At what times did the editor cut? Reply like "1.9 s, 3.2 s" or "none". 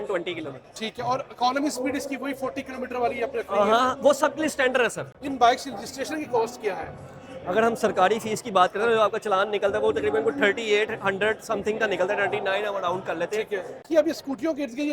5.1 s, 13.8 s